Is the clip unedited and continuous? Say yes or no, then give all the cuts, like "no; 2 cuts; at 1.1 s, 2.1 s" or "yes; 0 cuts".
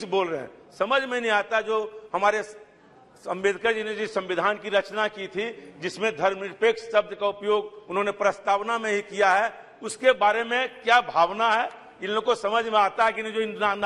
yes; 0 cuts